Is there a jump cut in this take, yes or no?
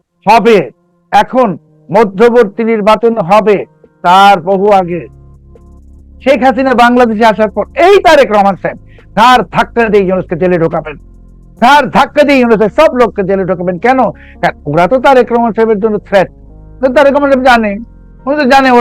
no